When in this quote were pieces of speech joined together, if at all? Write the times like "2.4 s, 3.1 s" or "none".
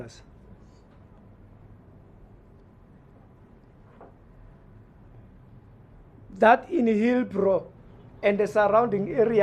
none